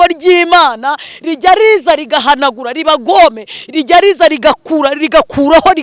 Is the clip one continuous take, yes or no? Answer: yes